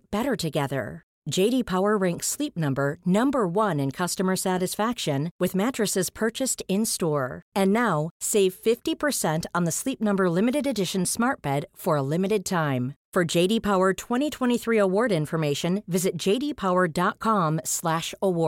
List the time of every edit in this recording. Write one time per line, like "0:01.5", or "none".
none